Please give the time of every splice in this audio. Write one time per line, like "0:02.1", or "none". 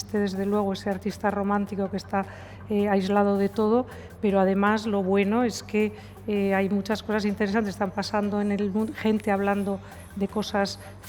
none